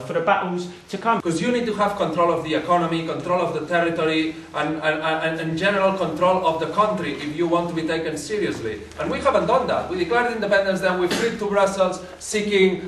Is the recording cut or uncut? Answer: cut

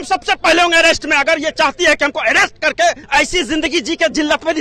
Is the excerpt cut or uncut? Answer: cut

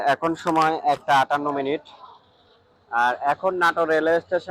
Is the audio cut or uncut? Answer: uncut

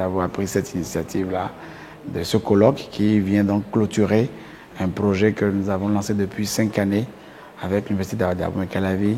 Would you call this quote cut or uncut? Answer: uncut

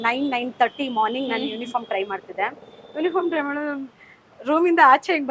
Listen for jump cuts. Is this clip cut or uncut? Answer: uncut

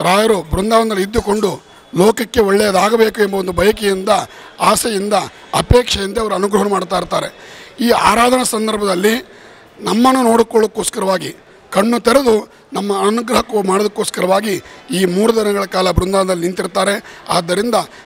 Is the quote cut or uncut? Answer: uncut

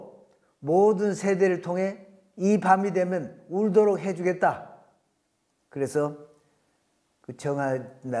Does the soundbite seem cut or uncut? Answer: uncut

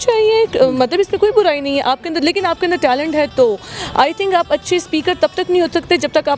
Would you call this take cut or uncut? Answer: uncut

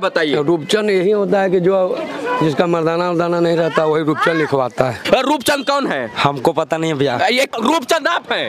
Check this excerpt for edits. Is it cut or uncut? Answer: cut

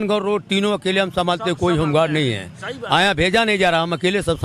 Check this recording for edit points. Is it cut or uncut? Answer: uncut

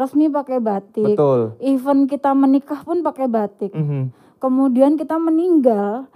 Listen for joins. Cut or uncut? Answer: uncut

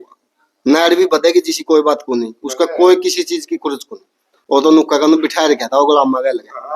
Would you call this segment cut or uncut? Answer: uncut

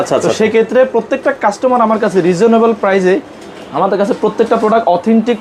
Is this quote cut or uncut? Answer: uncut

